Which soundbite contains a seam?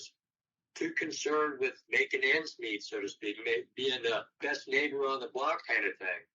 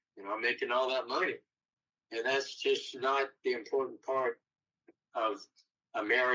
first; 2 cuts; at 1.8 s, 4.3 s

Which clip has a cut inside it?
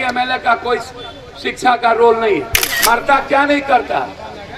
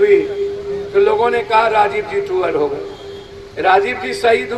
first; 1 cut; at 2.6 s

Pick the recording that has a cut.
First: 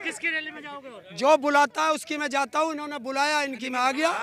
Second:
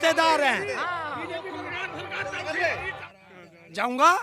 second; 1 cut; at 3.0 s

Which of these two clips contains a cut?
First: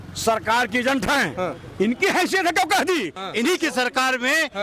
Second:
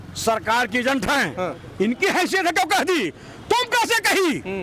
first; 1 cut; at 3.2 s

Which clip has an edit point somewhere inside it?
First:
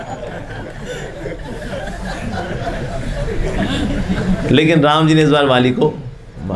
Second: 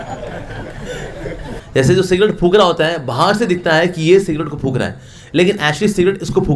second; 1 cut; at 1.6 s

